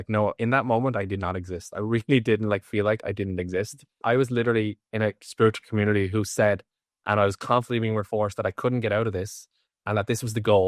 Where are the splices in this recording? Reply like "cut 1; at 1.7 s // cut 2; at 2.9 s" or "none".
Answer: cut 1; at 4.0 s